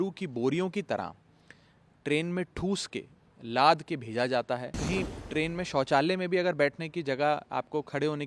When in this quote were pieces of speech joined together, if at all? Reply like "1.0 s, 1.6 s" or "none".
4.8 s